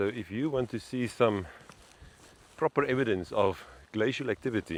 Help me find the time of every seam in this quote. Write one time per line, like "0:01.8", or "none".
none